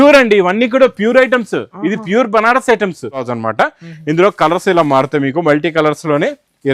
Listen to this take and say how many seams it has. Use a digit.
1